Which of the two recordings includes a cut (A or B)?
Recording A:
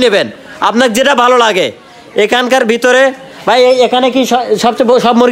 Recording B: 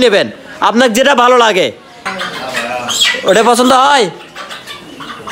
B